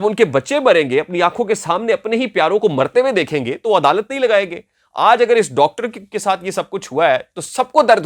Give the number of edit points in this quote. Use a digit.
0